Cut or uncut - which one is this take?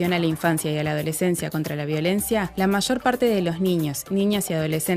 uncut